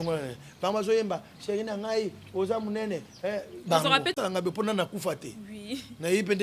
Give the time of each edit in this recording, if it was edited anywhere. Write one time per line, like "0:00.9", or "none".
0:04.2